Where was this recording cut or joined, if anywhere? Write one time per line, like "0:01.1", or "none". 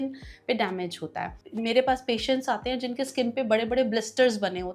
0:01.4